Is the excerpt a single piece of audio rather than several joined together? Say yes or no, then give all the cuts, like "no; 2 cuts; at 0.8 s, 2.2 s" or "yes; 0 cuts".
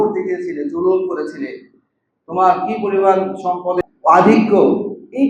no; 1 cut; at 3.8 s